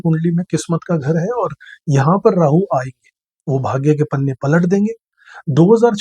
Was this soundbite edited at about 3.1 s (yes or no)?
no